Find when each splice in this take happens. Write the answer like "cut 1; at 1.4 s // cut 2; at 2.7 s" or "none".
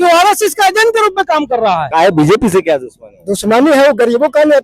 cut 1; at 1.9 s